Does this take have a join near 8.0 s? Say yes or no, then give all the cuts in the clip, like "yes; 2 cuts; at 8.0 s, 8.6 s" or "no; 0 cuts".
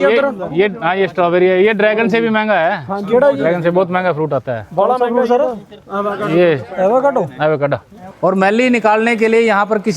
yes; 1 cut; at 8.0 s